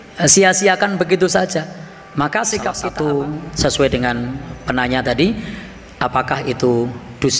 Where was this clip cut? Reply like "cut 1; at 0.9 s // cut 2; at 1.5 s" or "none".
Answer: cut 1; at 2.8 s